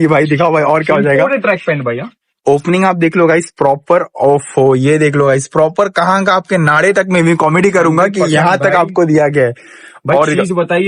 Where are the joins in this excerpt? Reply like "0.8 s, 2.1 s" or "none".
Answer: none